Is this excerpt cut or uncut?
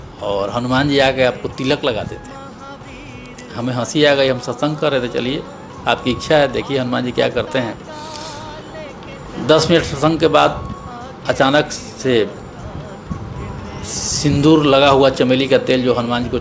uncut